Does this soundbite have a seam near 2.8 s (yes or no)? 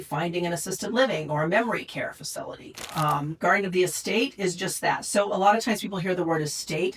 yes